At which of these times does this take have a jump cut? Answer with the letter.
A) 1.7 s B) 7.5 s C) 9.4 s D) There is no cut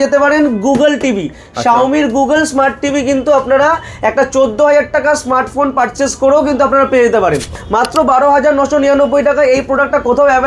B